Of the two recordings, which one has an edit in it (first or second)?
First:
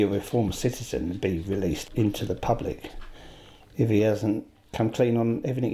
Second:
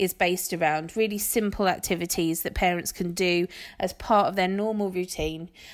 first